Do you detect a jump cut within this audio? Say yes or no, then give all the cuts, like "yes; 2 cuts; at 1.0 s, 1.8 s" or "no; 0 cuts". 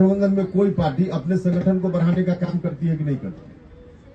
no; 0 cuts